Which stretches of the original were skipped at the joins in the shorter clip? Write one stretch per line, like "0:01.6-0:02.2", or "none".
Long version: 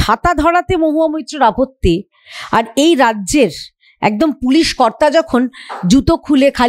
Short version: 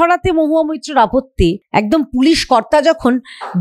0:02.1-0:03.9